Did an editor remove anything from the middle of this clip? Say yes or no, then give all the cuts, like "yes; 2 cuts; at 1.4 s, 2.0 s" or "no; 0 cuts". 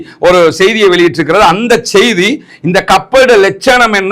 no; 0 cuts